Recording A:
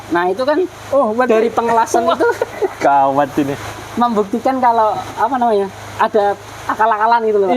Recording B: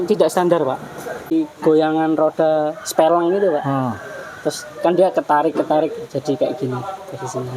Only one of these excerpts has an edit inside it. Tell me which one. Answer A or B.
B